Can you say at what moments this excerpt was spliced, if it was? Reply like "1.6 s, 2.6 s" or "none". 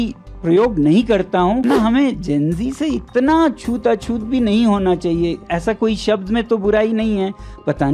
1.6 s

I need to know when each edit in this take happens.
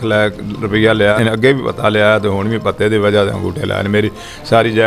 1.2 s

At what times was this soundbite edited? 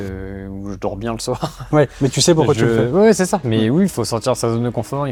none

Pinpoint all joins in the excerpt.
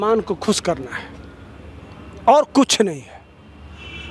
none

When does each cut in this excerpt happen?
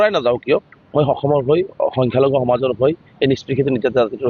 none

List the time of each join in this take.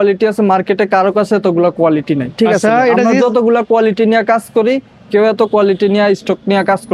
none

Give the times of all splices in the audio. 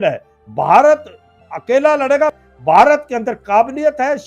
2.3 s

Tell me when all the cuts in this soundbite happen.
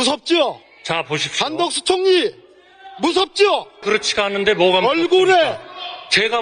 3.8 s

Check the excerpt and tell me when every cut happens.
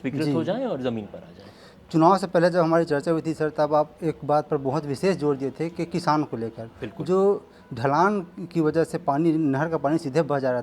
none

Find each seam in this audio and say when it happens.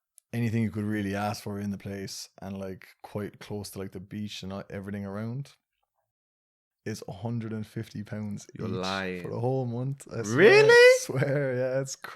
none

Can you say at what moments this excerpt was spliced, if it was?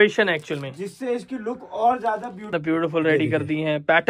2.5 s

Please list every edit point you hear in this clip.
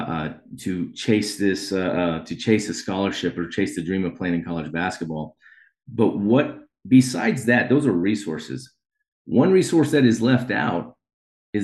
none

